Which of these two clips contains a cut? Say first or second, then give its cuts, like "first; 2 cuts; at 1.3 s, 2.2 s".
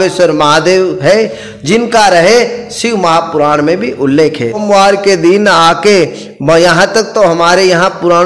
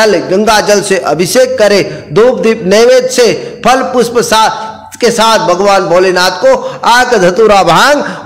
first; 1 cut; at 4.6 s